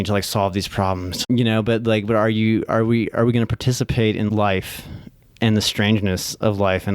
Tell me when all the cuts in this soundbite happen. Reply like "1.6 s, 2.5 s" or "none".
1.3 s, 4.3 s